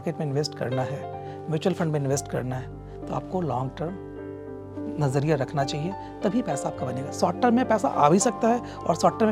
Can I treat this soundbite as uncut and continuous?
yes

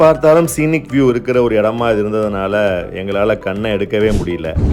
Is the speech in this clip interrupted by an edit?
no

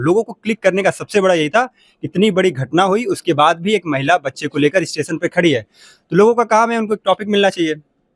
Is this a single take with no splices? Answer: yes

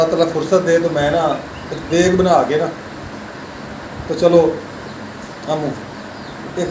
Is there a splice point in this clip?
no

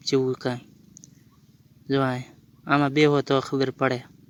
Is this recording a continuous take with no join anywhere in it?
yes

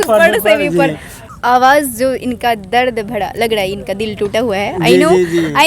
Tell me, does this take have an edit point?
yes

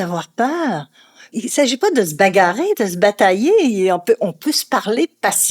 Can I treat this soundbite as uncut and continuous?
no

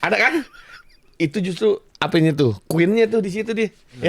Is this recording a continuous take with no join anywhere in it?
no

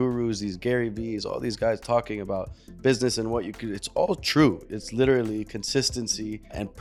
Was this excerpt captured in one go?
yes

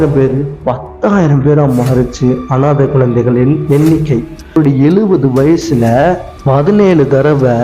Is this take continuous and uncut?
no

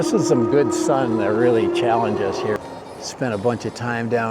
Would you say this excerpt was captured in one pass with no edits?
no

